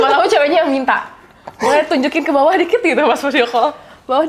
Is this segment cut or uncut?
uncut